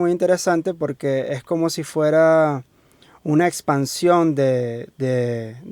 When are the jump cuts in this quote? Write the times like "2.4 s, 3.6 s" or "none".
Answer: none